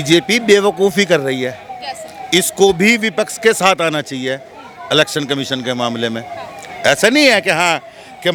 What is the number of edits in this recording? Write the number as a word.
zero